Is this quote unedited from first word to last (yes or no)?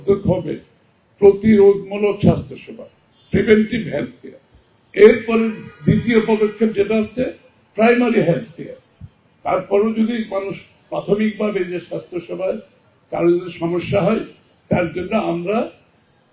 yes